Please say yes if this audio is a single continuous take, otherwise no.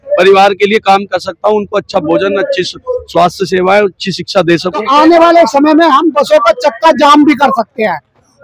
no